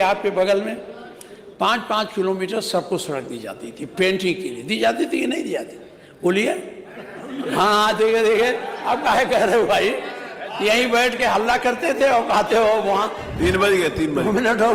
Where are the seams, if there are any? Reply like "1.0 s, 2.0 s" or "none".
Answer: 13.3 s